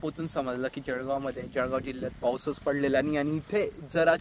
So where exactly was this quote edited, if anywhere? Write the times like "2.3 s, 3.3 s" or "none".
none